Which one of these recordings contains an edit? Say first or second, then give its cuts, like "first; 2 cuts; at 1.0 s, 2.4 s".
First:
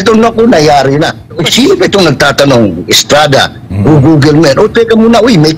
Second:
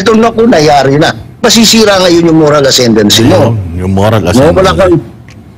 first; 1 cut; at 1.3 s